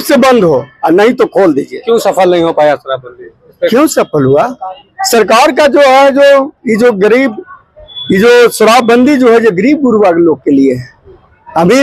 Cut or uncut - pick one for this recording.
uncut